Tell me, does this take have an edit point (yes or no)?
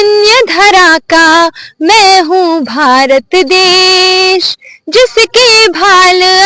no